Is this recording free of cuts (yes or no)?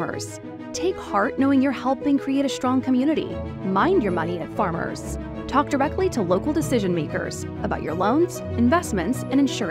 yes